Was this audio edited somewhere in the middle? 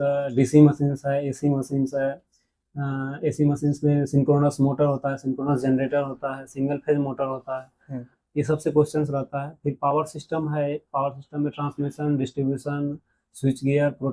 no; 0 cuts

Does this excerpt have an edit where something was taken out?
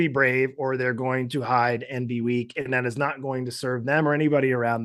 no; 0 cuts

